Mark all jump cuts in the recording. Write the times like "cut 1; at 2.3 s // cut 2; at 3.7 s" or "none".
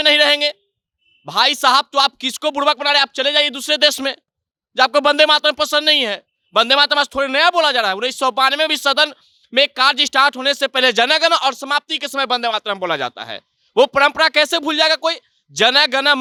none

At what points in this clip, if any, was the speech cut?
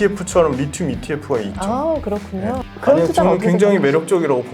cut 1; at 2.6 s

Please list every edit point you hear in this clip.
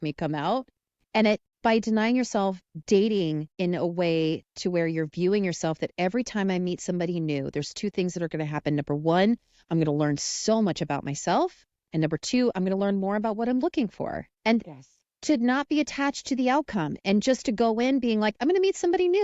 cut 1; at 1.5 s // cut 2; at 2.7 s // cut 3; at 3.5 s // cut 4; at 14.3 s

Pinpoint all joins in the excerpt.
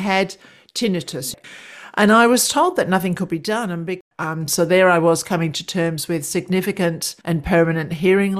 cut 1; at 1.3 s // cut 2; at 4.0 s // cut 3; at 7.1 s

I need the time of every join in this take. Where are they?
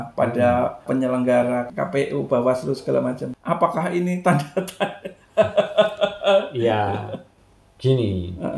cut 1; at 0.8 s // cut 2; at 1.7 s // cut 3; at 3.3 s

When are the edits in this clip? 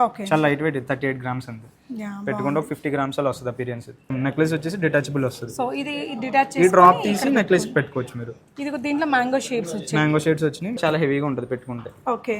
cut 1; at 4.1 s // cut 2; at 10.8 s

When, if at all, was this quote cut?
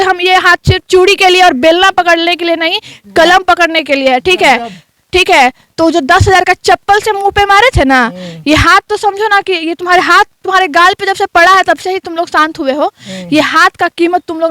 none

